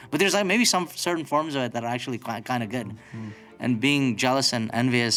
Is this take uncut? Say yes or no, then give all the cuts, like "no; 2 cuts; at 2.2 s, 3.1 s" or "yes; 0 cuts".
yes; 0 cuts